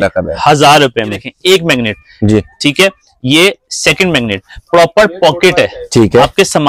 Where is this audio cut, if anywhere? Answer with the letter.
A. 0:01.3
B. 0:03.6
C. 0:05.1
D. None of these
A